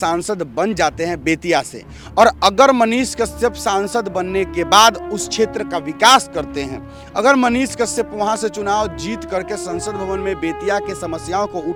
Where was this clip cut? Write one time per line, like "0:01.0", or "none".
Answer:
none